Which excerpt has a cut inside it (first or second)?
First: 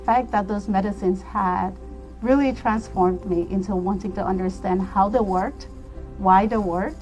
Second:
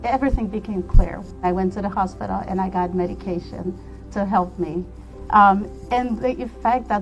second